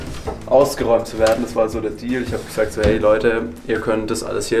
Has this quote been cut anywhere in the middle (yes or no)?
no